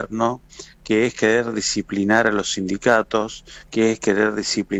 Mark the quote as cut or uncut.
uncut